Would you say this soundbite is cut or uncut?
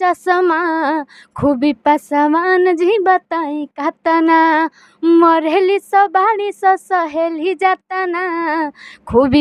uncut